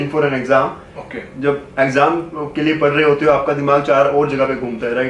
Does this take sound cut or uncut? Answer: uncut